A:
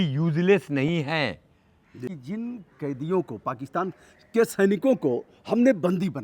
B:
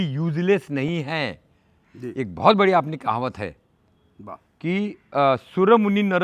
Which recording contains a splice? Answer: A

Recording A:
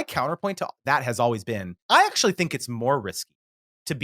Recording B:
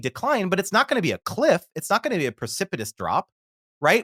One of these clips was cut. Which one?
A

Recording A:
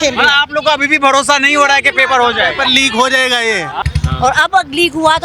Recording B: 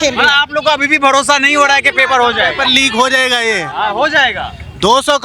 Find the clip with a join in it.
A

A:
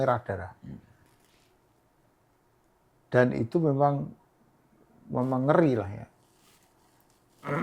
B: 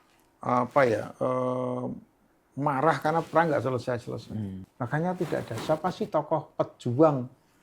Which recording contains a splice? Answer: B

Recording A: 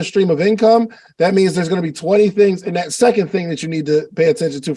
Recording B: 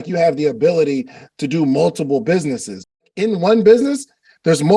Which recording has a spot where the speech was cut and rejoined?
B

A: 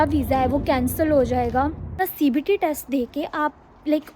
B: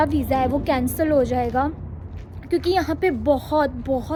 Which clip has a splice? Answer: A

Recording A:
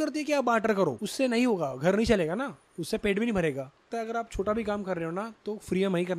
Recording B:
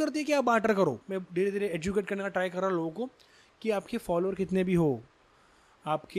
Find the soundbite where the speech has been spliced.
A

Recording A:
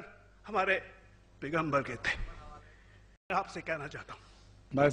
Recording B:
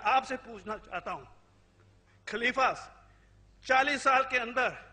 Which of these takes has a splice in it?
A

